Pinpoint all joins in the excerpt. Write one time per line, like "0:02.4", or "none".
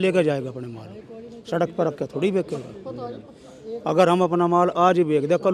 none

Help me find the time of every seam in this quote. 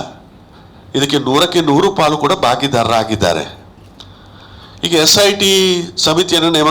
none

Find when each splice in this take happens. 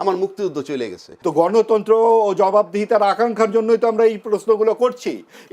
0:01.0

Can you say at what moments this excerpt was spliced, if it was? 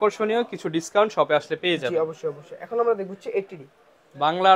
none

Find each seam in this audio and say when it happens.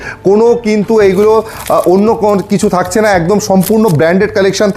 none

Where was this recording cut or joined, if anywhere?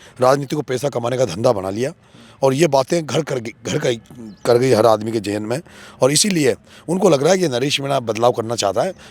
none

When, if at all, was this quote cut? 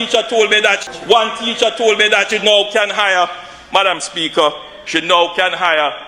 0:00.7
0:02.3

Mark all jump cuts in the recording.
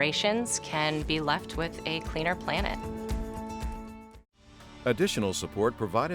0:04.6

